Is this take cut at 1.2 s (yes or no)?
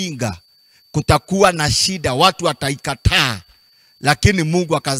no